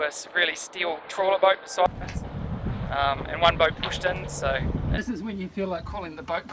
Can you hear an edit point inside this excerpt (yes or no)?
yes